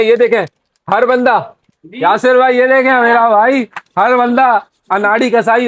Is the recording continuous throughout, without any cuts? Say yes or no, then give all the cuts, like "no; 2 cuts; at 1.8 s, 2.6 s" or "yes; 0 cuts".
yes; 0 cuts